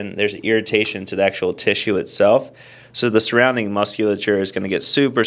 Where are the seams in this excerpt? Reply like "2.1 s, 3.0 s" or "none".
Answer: none